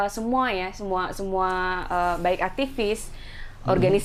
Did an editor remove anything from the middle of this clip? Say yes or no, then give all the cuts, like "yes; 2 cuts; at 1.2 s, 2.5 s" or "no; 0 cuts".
no; 0 cuts